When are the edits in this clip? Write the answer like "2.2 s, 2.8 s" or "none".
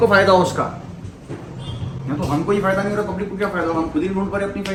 none